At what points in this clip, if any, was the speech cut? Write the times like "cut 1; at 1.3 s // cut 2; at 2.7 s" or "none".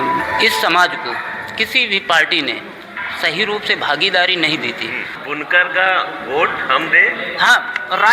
cut 1; at 5.2 s